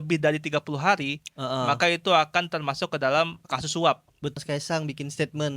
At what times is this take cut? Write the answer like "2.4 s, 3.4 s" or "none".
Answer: 4.2 s